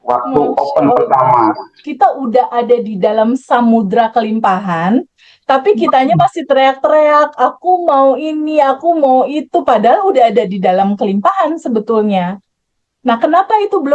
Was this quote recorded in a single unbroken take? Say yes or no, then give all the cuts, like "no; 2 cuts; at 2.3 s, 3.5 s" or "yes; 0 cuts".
no; 1 cut; at 1.9 s